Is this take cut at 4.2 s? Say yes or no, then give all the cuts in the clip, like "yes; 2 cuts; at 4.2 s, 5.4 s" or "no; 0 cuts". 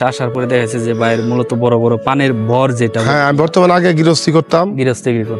no; 0 cuts